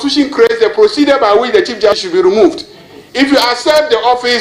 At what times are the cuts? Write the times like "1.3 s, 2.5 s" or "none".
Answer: 2.0 s